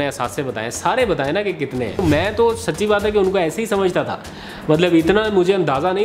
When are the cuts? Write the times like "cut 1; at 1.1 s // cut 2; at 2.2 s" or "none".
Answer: cut 1; at 2.0 s